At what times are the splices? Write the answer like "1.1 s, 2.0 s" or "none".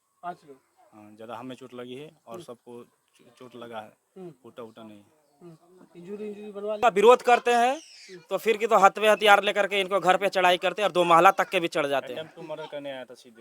6.8 s